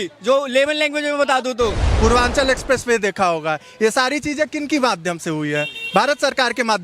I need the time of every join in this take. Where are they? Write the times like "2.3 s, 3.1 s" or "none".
1.9 s